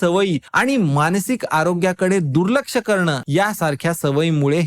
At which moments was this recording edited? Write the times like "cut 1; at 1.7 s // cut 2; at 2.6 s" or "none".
cut 1; at 3.2 s